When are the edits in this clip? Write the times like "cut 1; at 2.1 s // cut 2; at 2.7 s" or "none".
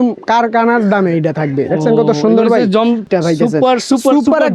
cut 1; at 3.0 s